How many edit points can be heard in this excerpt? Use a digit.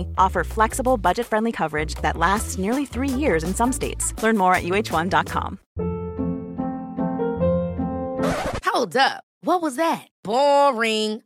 1